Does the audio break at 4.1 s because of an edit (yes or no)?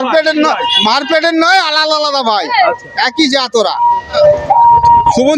yes